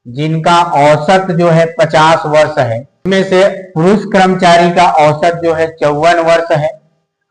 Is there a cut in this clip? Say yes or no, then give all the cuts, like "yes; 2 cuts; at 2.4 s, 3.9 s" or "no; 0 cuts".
yes; 1 cut; at 3.0 s